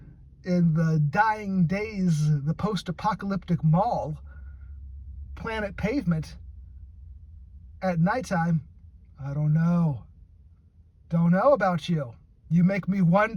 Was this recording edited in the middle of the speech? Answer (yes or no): no